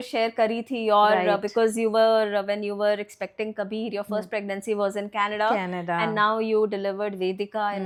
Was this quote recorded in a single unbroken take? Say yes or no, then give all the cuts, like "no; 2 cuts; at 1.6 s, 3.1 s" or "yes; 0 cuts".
yes; 0 cuts